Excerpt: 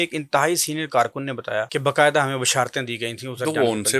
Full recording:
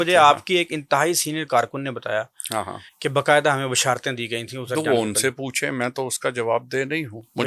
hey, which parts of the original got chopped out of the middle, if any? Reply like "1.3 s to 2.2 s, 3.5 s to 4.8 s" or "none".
2.3 s to 3.0 s